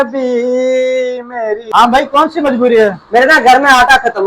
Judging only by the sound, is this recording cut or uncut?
cut